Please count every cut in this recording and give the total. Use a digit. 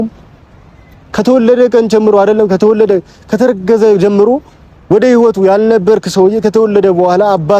0